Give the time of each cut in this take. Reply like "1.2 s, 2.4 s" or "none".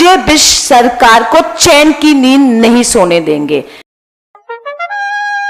3.8 s